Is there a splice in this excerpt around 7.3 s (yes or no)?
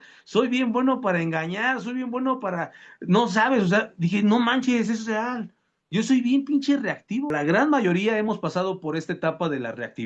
yes